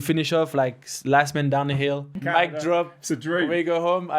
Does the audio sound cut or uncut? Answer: cut